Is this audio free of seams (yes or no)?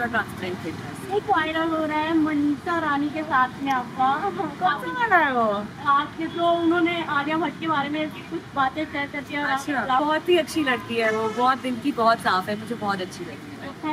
no